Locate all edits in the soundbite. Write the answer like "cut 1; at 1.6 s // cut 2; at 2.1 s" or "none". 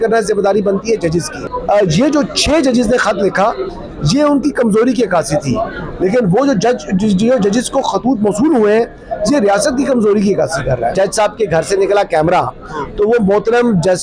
cut 1; at 10.9 s